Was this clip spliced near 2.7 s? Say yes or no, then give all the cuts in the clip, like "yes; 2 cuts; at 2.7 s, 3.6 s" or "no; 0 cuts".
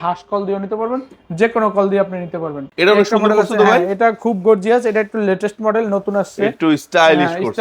yes; 1 cut; at 2.7 s